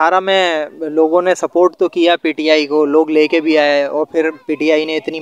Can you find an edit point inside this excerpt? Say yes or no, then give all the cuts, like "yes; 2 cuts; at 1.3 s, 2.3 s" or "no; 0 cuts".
no; 0 cuts